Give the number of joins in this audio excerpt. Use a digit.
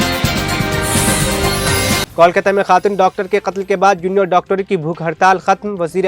1